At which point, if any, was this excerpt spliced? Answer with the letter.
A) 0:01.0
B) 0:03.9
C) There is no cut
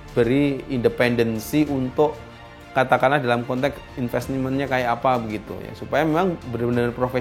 B